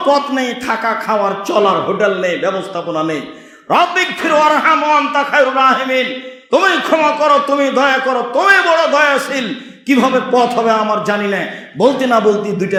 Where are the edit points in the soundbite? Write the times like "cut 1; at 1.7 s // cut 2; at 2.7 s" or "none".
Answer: none